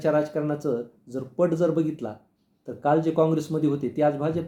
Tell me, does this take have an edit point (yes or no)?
no